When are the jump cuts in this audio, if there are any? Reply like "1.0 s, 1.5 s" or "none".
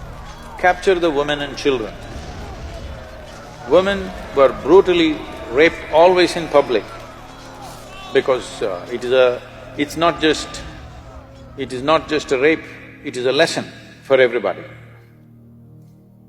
none